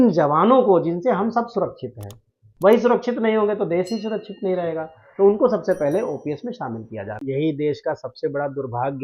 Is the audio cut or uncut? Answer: cut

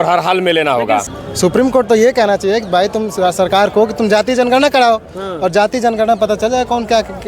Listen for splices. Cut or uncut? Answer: cut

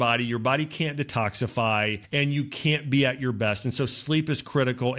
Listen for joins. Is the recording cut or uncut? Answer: cut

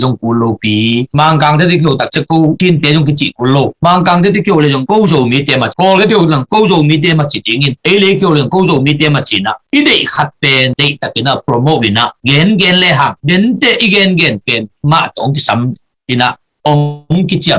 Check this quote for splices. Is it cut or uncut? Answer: uncut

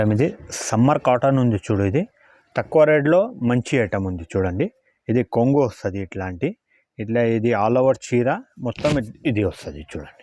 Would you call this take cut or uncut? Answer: uncut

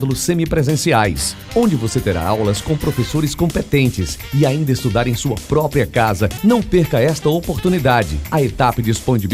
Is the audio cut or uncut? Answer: uncut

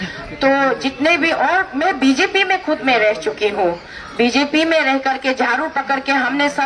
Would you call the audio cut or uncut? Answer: uncut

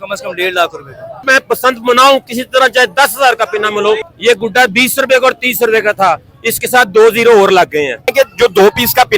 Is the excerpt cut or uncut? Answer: cut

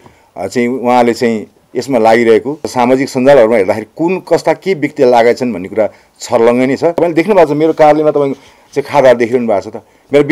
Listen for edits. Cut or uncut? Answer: cut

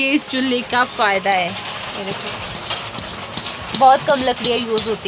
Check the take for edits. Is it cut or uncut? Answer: uncut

